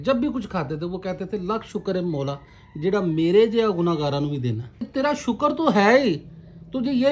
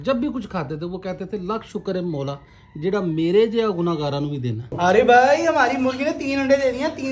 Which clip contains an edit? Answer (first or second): second